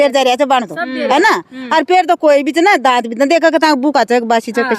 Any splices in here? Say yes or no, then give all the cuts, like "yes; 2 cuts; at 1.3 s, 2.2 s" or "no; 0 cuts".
no; 0 cuts